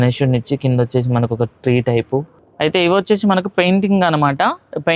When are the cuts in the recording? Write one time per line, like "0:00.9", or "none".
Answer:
0:02.4